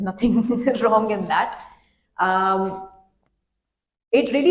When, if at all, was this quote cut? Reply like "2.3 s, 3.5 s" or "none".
none